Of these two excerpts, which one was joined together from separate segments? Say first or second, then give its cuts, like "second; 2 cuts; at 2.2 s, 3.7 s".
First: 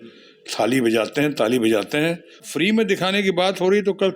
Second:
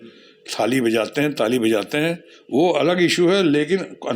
first; 1 cut; at 2.5 s